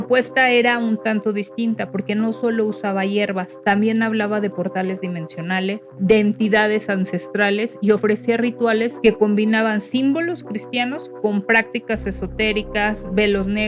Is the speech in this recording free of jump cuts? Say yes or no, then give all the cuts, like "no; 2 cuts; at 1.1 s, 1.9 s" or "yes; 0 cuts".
no; 2 cuts; at 5.9 s, 8.9 s